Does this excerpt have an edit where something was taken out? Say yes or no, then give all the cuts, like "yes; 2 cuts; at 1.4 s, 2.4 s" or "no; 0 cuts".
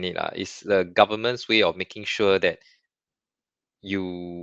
no; 0 cuts